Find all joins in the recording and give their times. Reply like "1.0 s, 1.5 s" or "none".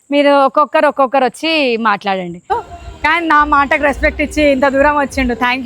2.5 s